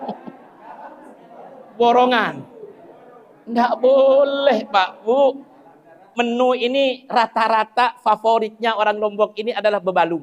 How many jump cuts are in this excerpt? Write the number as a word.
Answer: one